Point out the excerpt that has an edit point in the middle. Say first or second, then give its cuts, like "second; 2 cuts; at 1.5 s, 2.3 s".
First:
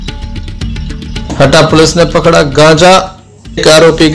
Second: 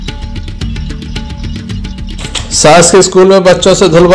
first; 1 cut; at 1.1 s